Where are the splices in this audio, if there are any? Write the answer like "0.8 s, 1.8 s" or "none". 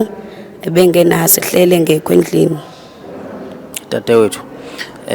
3.8 s